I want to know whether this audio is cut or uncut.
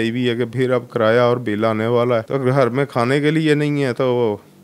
cut